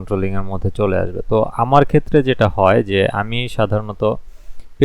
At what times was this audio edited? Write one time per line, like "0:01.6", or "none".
none